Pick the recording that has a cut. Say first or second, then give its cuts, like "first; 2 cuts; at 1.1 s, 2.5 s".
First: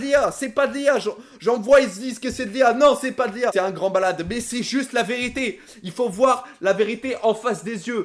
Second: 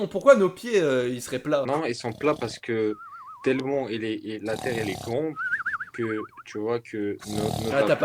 second; 1 cut; at 1.7 s